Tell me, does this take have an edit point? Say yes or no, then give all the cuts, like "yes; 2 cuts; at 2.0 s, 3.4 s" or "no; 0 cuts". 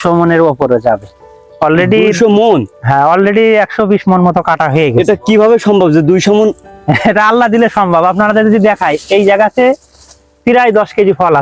no; 0 cuts